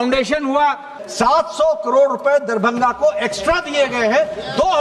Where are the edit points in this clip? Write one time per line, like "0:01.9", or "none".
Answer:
0:01.0